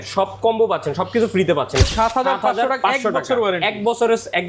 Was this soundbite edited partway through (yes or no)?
yes